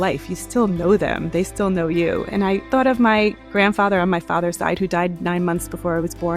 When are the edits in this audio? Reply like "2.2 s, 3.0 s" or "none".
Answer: 2.7 s